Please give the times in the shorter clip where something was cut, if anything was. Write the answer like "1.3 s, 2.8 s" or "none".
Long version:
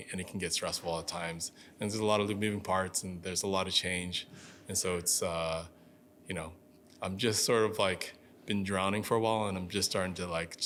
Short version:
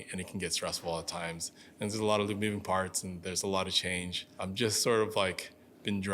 4.2 s